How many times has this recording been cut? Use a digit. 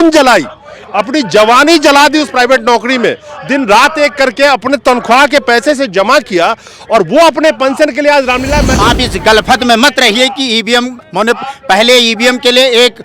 1